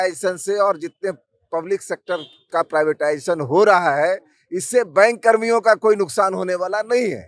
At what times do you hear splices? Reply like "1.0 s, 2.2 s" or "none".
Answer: none